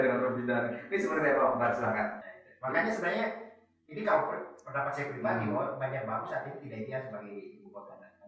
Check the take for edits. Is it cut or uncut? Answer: cut